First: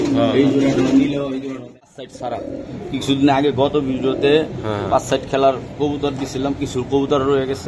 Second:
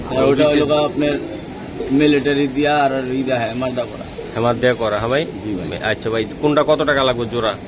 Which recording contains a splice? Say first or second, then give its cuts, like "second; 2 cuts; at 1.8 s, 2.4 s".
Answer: first; 1 cut; at 1.7 s